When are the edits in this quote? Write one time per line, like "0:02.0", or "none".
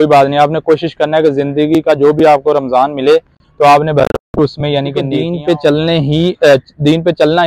0:05.2